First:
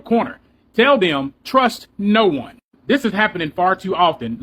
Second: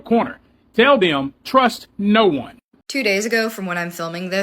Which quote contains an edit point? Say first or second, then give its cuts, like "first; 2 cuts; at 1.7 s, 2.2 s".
second; 1 cut; at 2.7 s